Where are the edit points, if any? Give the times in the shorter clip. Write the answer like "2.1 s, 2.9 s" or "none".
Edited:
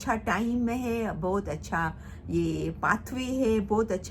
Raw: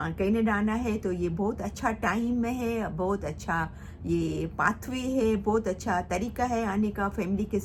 none